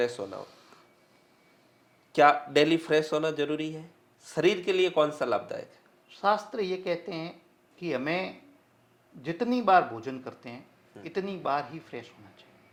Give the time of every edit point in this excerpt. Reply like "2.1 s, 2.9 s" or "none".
none